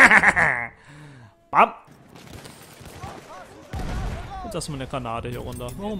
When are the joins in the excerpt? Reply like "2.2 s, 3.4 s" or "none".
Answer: 1.9 s

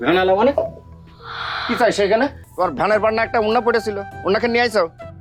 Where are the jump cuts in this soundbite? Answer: 2.4 s

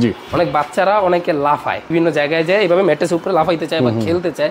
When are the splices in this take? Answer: 1.9 s

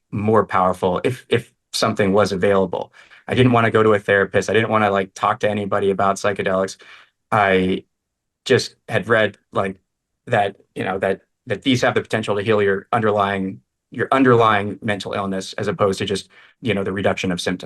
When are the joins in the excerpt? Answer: 16.5 s

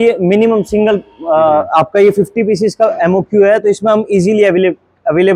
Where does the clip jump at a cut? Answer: none

